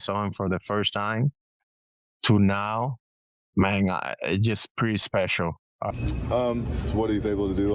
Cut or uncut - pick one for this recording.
cut